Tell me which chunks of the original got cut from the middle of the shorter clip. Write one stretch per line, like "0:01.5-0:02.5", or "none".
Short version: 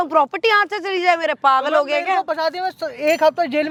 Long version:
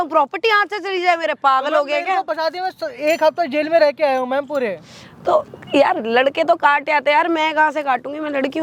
none